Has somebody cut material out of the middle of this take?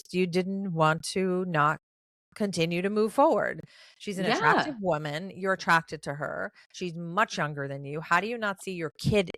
no; 0 cuts

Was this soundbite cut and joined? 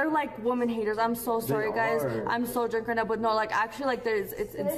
no; 0 cuts

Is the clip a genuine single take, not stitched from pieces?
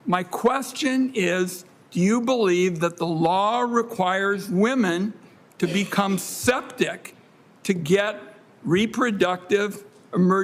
yes; 0 cuts

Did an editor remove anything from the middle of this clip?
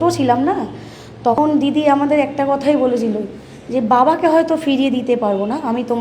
yes; 1 cut; at 1.4 s

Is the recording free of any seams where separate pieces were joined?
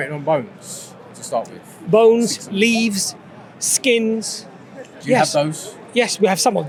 yes; 0 cuts

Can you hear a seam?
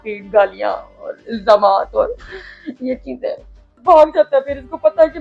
yes; 1 cut; at 3.8 s

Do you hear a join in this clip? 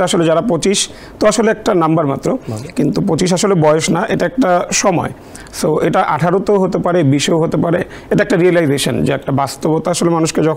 no; 0 cuts

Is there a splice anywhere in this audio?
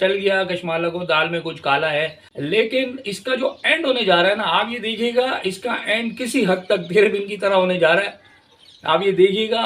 yes; 1 cut; at 2.2 s

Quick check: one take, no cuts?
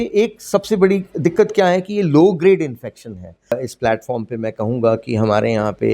no; 1 cut; at 3.5 s

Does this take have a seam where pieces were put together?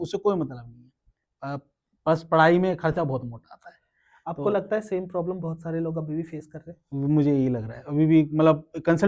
no; 0 cuts

